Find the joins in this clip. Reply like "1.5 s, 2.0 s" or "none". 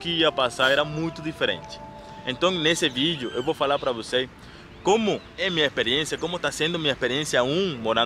5.3 s